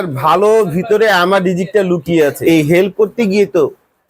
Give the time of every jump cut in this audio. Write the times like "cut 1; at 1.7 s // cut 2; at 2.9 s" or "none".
cut 1; at 2.4 s